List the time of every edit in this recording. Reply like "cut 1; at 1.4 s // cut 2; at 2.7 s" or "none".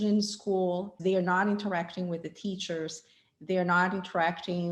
cut 1; at 0.9 s